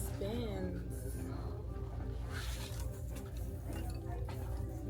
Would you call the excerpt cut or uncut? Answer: uncut